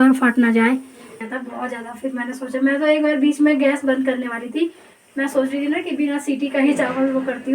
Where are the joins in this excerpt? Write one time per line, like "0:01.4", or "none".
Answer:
0:01.2